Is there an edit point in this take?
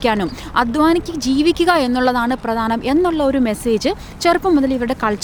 no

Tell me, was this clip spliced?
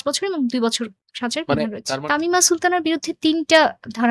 yes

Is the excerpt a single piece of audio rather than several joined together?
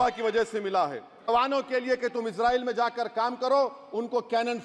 no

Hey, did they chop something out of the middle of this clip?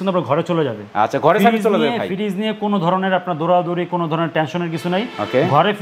no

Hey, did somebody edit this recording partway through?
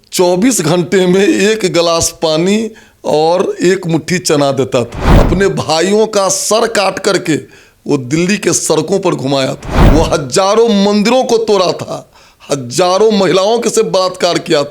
yes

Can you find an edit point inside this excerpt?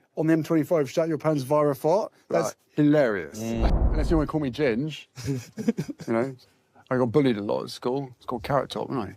yes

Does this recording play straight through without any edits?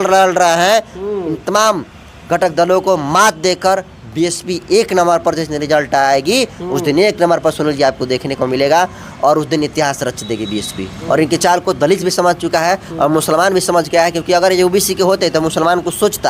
no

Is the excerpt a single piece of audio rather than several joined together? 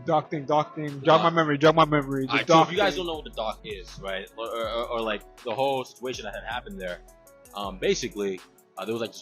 yes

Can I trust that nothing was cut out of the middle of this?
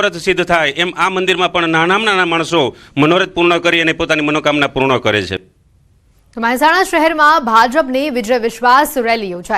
no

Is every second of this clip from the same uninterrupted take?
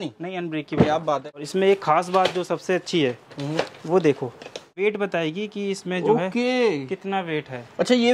no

